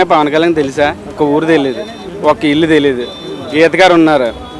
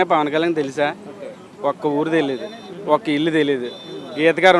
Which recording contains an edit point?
first; 1 cut; at 1.1 s

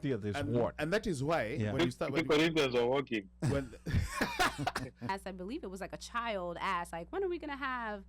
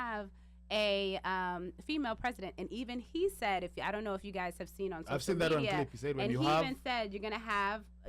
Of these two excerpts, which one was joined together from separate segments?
first; 1 cut; at 5.1 s

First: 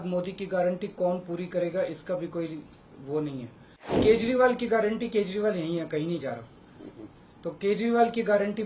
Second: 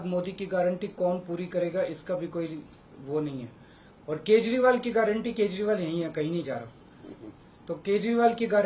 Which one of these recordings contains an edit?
first; 1 cut; at 4.0 s

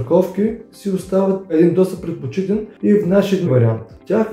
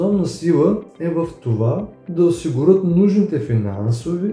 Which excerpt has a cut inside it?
first; 3 cuts; at 1.5 s, 2.7 s, 3.5 s

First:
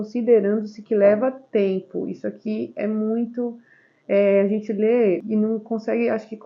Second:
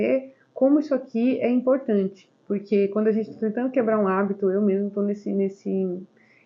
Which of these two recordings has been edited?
first; 1 cut; at 5.2 s

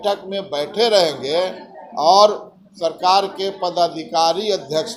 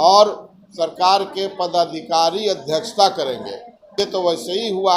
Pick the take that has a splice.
second; 1 cut; at 4.0 s

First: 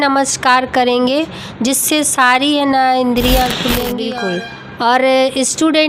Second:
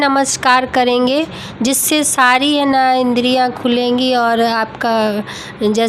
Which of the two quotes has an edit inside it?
first; 1 cut; at 4.0 s

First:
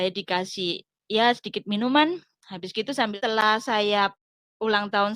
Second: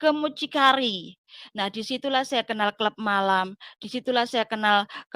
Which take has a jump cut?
first; 1 cut; at 3.1 s

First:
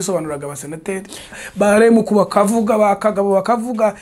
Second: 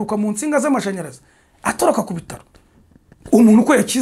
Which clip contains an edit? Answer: first; 1 cut; at 1.3 s

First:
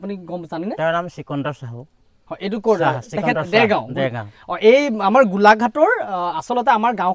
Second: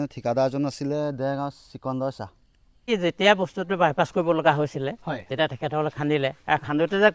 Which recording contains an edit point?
second; 1 cut; at 2.8 s

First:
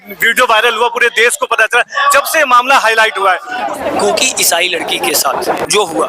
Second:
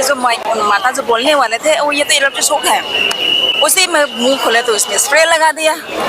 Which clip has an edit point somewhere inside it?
first; 1 cut; at 3.6 s

